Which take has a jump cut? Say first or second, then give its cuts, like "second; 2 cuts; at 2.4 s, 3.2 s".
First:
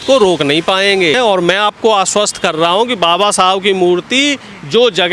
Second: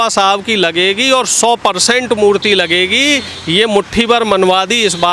first; 1 cut; at 1.2 s